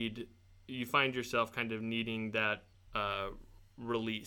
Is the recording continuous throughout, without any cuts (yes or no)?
no